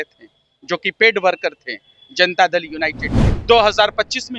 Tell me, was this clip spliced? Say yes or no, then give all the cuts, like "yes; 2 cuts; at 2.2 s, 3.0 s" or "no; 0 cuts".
yes; 1 cut; at 3.3 s